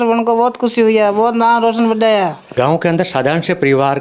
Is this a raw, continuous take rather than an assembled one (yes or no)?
no